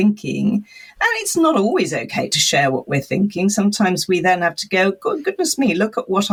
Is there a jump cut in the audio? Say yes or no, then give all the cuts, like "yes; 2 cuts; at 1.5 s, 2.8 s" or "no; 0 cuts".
no; 0 cuts